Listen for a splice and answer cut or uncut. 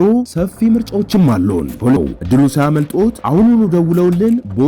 cut